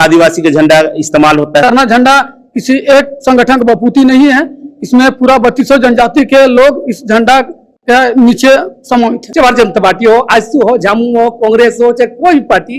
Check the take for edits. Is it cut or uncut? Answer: cut